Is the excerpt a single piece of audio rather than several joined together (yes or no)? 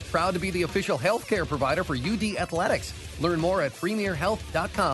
yes